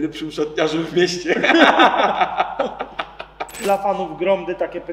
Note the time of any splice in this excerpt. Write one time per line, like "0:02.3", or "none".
0:03.6